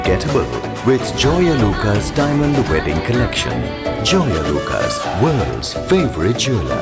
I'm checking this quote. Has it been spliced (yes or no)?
no